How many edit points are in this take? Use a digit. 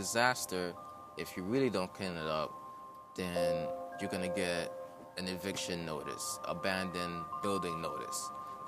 1